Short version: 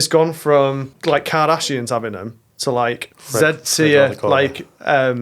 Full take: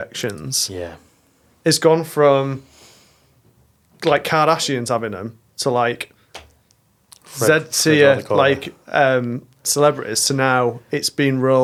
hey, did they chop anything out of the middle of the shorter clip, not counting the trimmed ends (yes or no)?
yes